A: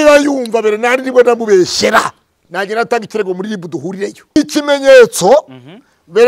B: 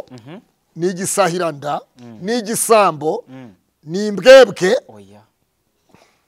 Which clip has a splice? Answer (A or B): A